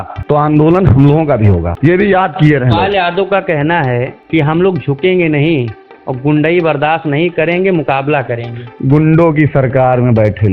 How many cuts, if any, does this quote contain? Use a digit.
0